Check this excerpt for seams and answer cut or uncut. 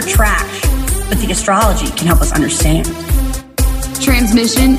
uncut